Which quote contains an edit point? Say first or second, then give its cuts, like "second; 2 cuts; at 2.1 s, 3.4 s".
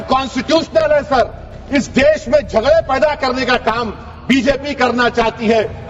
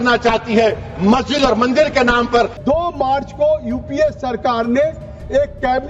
second; 1 cut; at 2.6 s